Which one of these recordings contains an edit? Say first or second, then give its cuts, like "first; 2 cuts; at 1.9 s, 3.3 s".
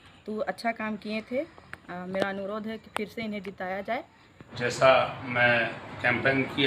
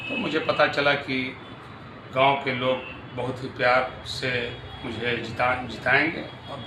first; 1 cut; at 4.5 s